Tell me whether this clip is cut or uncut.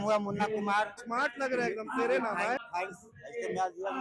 cut